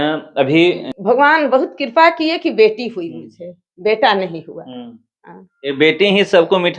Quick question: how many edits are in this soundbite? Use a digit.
1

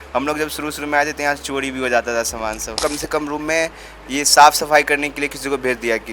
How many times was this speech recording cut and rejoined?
1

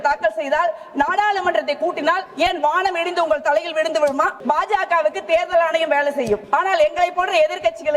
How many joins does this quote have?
3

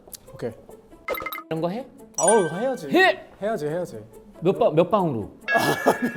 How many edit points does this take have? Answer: 0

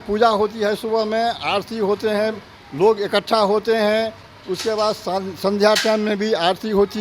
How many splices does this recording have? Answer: 0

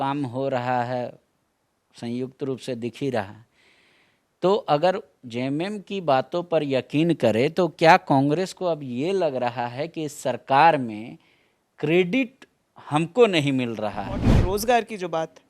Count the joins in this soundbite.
1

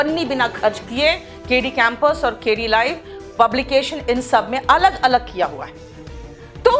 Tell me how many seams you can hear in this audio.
0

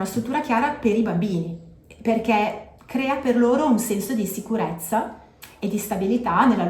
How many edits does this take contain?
0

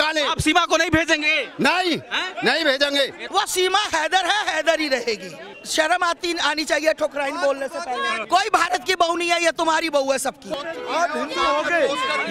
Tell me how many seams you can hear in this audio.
3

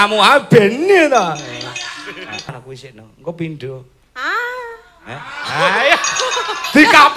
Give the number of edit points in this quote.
1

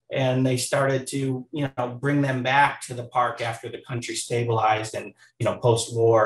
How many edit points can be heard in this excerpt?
0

